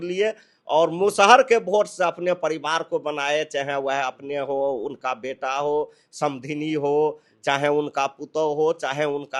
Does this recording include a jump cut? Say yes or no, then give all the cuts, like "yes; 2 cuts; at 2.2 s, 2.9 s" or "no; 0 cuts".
no; 0 cuts